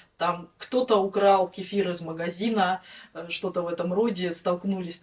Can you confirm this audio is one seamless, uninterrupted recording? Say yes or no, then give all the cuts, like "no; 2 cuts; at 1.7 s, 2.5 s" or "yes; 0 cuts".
yes; 0 cuts